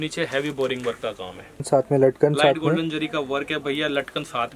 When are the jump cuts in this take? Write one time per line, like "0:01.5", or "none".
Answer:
0:01.6